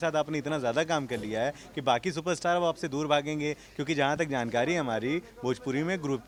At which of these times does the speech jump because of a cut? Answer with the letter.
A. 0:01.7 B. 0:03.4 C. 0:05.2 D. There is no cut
D